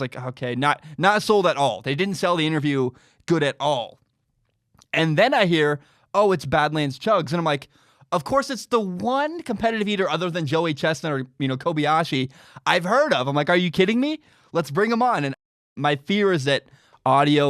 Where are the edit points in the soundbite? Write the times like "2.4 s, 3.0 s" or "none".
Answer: 15.6 s